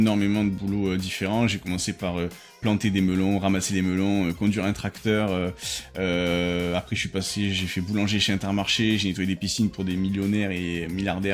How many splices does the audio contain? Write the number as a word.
zero